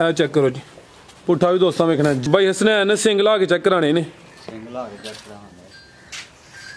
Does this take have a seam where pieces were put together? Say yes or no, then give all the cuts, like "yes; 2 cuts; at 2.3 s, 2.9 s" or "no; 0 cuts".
yes; 1 cut; at 2.2 s